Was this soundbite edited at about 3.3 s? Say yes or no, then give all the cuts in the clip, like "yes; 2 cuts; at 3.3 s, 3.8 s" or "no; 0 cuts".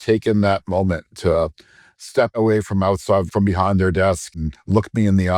yes; 3 cuts; at 2.3 s, 3.3 s, 4.4 s